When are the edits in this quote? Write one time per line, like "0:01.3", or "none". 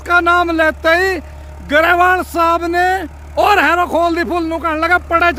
none